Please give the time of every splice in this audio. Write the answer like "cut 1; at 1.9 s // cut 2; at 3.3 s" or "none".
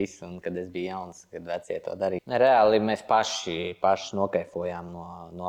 cut 1; at 2.2 s